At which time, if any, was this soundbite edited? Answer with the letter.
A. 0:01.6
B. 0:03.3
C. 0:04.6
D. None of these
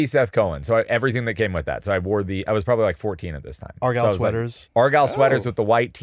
C